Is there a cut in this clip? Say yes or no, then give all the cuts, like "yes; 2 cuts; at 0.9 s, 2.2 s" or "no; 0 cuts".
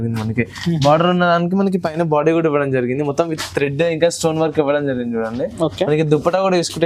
no; 0 cuts